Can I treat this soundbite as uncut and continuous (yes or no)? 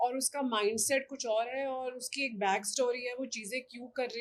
yes